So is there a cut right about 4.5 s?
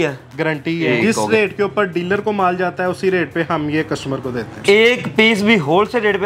yes; 2 cuts; at 0.9 s, 4.5 s

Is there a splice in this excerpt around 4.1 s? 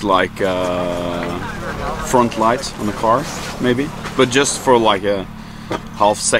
no; 0 cuts

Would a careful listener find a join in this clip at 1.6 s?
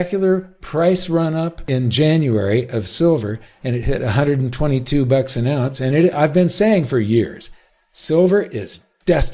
yes; 1 cut; at 1.6 s

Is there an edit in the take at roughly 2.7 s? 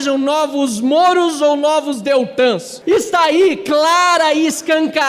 yes; 1 cut; at 2.7 s

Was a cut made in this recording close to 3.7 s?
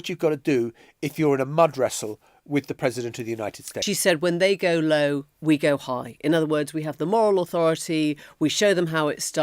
yes; 1 cut; at 3.7 s

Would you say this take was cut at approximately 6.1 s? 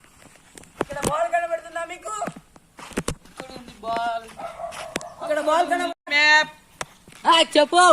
yes; 1 cut; at 6.1 s

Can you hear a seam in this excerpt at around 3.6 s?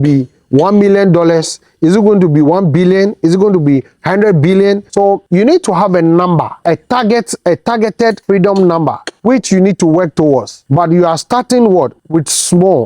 no; 6 cuts; at 5.0 s, 6.5 s, 8.2 s, 9.1 s, 10.6 s, 12.0 s

